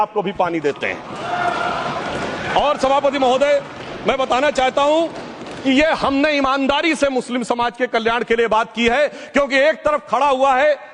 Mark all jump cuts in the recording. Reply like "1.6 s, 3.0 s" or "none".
none